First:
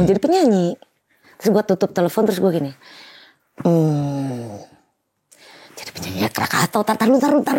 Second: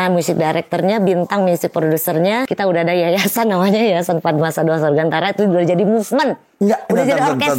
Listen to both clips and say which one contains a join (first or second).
second